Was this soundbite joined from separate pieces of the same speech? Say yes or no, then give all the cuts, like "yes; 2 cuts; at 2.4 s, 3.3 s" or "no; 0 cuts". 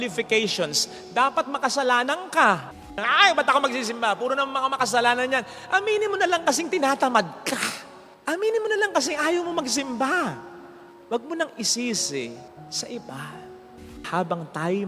yes; 2 cuts; at 2.9 s, 14.0 s